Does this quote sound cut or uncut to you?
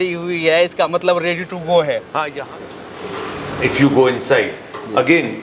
cut